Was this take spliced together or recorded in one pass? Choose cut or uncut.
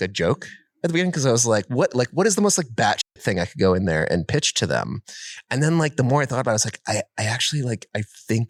uncut